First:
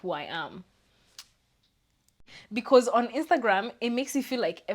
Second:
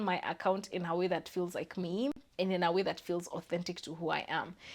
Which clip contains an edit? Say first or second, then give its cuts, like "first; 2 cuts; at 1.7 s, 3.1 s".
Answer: first; 1 cut; at 2.1 s